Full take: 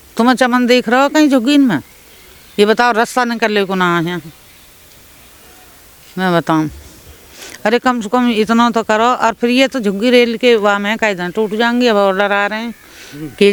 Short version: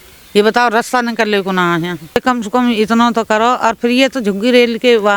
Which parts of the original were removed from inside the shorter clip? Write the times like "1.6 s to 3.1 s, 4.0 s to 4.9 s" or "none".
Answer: 4.4 s to 7.7 s

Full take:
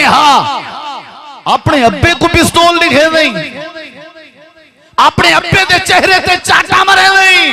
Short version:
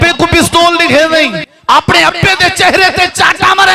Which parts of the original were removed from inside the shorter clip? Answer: 3.5 s to 4.8 s

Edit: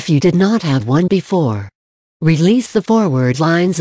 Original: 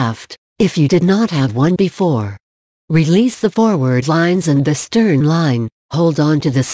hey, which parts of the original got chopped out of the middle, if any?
none

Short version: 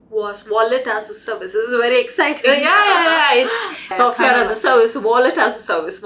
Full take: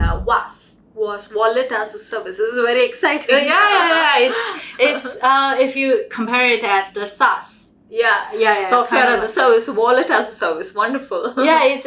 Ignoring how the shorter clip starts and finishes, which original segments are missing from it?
4.7 s to 8.6 s

